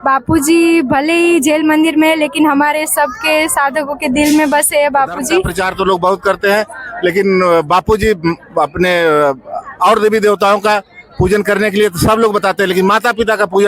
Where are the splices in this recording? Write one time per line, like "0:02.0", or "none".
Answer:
0:05.6